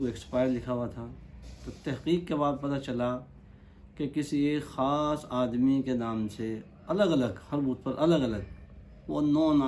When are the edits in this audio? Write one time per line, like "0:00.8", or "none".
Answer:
none